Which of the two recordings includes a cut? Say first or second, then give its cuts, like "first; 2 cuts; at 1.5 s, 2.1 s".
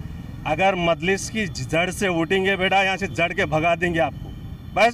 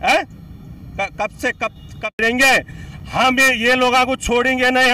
second; 1 cut; at 2.2 s